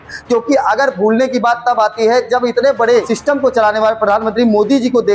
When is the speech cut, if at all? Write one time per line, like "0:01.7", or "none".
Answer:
0:03.1